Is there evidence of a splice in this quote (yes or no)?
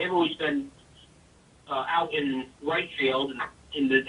no